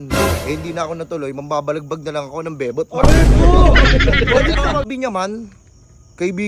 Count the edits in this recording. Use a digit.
1